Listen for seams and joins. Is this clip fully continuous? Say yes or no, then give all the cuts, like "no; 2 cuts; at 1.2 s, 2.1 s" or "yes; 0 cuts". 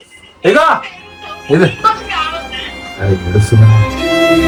yes; 0 cuts